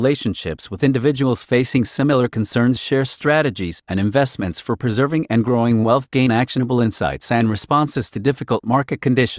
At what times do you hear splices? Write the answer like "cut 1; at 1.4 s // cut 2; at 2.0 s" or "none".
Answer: none